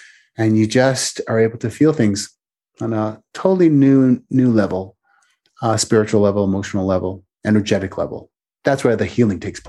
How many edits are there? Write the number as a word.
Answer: one